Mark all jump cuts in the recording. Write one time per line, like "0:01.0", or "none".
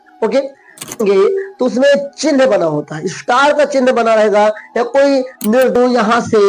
0:01.0
0:05.7

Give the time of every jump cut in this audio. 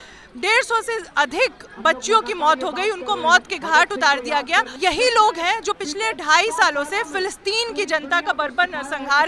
0:04.7

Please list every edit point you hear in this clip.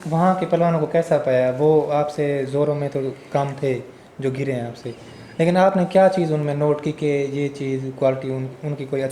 none

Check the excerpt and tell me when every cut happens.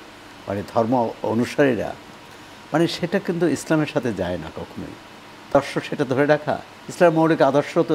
0:05.5

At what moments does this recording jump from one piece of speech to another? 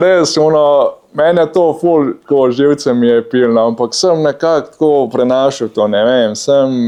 none

